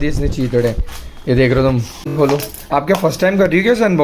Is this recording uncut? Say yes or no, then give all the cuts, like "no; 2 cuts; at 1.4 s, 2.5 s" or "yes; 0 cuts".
no; 1 cut; at 2.1 s